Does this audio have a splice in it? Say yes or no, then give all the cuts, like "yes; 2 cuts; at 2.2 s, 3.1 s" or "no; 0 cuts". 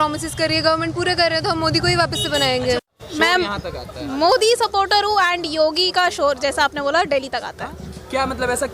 yes; 1 cut; at 3.0 s